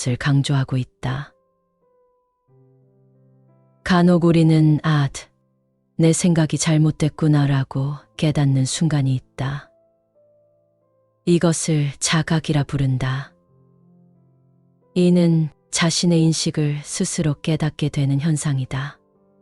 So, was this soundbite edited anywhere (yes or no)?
yes